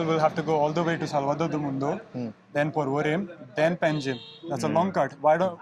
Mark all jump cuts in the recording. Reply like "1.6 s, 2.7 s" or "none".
none